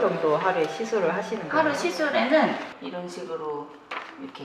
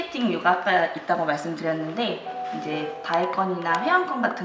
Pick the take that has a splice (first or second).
first